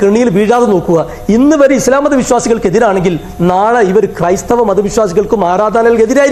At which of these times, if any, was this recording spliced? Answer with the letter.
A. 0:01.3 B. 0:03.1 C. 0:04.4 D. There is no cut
D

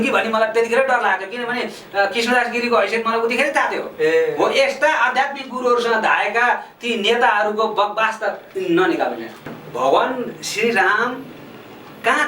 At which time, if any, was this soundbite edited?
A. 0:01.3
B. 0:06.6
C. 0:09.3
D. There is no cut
C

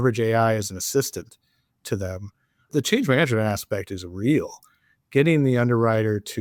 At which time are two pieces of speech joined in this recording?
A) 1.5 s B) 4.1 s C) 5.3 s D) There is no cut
D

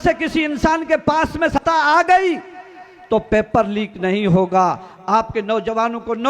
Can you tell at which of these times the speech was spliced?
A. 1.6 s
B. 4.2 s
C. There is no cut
A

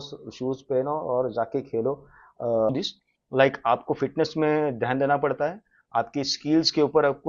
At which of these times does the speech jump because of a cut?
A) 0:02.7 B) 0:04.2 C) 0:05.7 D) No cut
A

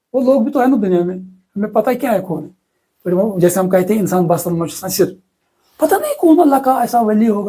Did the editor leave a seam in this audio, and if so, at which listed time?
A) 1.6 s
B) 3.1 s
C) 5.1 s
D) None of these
D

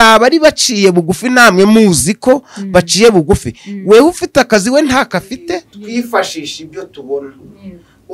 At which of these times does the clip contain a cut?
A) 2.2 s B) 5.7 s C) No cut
B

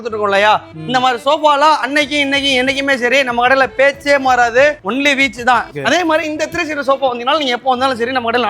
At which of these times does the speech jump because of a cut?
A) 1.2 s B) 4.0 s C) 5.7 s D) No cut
C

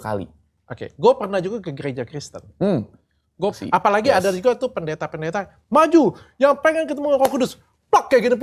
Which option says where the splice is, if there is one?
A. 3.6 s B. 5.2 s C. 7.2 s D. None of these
A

